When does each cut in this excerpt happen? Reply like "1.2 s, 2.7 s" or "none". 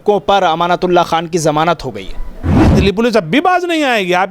2.6 s